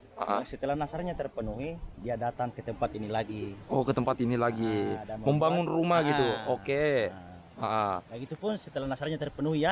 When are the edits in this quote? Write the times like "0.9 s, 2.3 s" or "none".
3.6 s